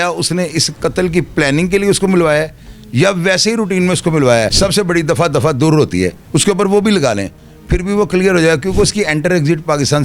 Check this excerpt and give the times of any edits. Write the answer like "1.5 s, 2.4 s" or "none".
4.5 s